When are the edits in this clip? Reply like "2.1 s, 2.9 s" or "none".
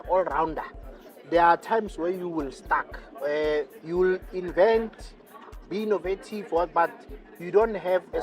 none